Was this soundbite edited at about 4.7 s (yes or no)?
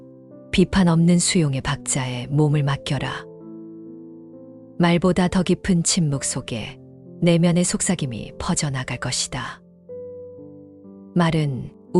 yes